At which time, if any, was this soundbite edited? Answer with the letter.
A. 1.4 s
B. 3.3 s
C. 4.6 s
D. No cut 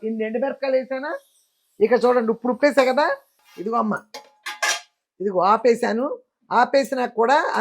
B